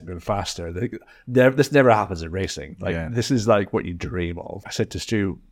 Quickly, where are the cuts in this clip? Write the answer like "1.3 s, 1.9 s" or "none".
4.6 s